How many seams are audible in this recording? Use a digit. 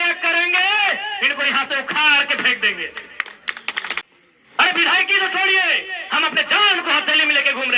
1